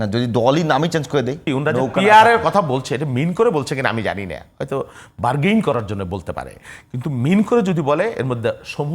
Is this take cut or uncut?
cut